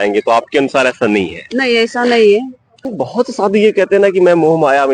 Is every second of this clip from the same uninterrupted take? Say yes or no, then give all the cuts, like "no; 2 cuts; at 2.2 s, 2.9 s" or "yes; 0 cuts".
no; 1 cut; at 2.6 s